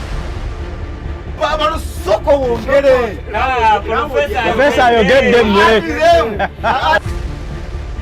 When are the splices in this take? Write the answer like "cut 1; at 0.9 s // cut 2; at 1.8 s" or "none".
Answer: cut 1; at 6.6 s